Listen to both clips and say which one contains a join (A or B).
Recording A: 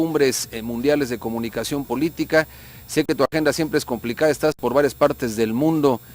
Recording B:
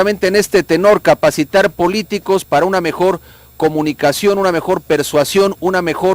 A